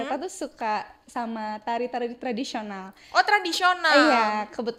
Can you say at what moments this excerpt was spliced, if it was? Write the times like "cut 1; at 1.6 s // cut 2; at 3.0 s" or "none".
none